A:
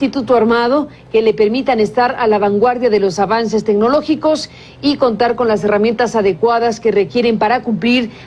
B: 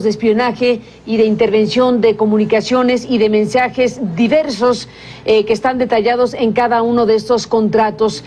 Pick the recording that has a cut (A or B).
B